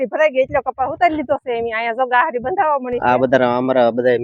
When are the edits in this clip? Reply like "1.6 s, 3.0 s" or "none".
3.0 s